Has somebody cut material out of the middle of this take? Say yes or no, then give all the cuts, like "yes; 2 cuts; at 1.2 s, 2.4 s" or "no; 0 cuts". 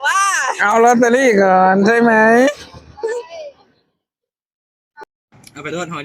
yes; 1 cut; at 5.0 s